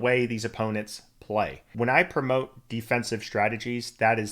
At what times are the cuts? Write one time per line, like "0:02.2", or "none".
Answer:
0:01.7